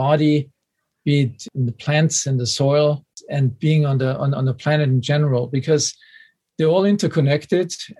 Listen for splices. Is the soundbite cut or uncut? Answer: cut